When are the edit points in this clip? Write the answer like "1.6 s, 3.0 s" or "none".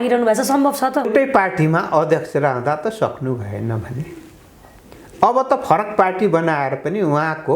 1.1 s